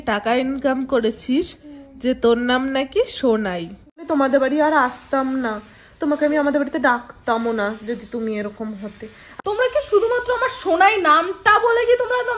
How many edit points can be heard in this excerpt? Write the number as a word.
two